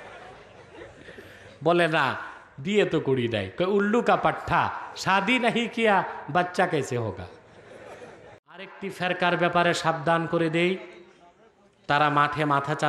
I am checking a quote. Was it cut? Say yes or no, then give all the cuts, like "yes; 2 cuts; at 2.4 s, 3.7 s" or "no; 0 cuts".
yes; 1 cut; at 8.8 s